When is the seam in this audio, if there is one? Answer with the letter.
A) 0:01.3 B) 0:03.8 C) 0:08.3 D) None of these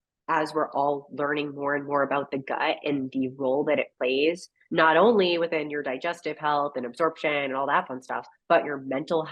D